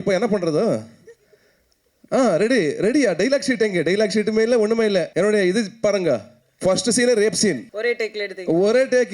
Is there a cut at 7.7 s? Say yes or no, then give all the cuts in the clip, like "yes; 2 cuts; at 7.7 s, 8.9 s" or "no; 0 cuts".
yes; 2 cuts; at 5.1 s, 7.7 s